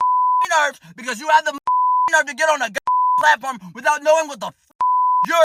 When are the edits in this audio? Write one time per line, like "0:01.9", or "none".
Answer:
none